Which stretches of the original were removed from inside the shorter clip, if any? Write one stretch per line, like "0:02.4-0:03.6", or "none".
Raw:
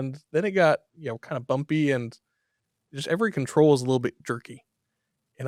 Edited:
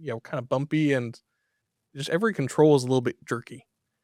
none